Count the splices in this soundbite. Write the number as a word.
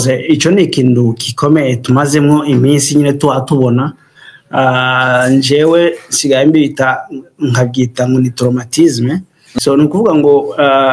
one